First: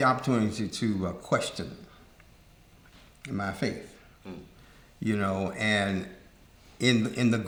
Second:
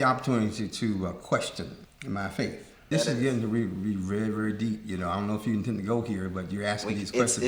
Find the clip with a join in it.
second; 2 cuts; at 1.9 s, 2.8 s

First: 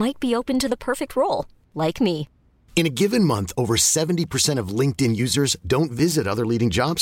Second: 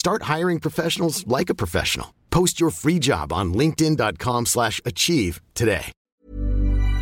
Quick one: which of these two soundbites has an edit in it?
second; 1 cut; at 6.0 s

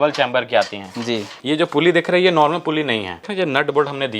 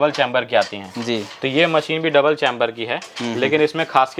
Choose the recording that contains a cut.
first; 2 cuts; at 1.4 s, 3.3 s

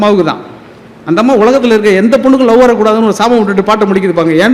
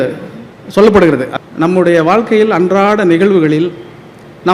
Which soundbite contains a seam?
second; 1 cut; at 1.3 s

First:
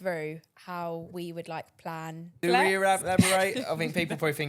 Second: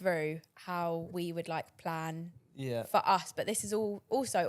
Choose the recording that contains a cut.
first; 1 cut; at 2.4 s

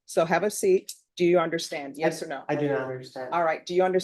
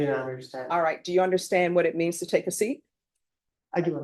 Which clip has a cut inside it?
first; 1 cut; at 1.0 s

